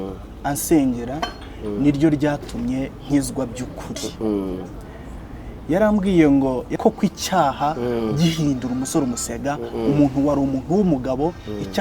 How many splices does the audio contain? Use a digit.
1